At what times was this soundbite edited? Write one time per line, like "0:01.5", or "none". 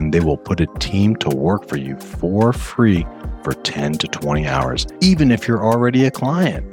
0:04.8